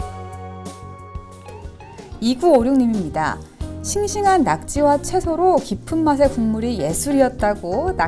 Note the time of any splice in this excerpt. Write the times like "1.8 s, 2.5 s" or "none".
2.0 s

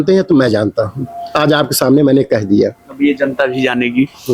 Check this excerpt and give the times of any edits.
none

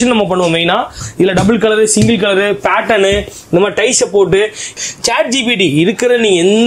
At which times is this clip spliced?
1.0 s, 4.8 s

